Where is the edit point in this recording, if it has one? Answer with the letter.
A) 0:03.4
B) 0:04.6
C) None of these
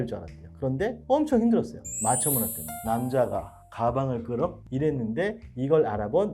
B